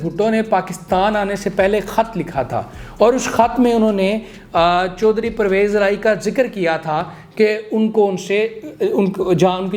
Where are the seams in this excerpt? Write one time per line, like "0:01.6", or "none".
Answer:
none